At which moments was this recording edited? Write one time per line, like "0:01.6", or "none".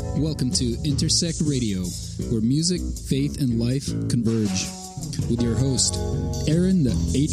none